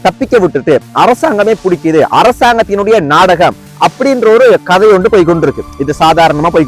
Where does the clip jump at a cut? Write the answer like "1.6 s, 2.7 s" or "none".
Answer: none